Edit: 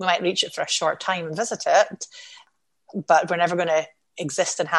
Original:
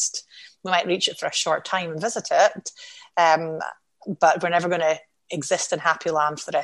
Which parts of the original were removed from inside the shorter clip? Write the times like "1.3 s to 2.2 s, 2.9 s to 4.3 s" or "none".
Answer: 3.0 s to 3.5 s